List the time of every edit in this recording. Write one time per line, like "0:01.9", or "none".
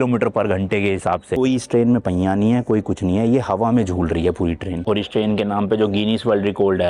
0:01.3
0:04.8